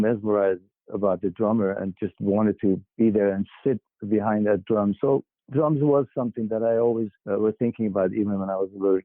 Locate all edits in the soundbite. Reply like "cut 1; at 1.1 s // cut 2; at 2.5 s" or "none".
cut 1; at 2.9 s // cut 2; at 7.2 s